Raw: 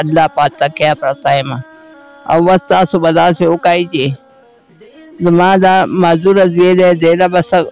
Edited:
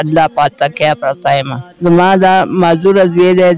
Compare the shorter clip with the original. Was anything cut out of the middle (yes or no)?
yes